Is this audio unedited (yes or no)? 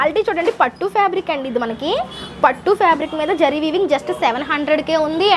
yes